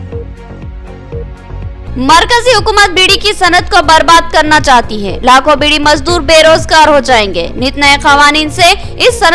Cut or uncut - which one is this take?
cut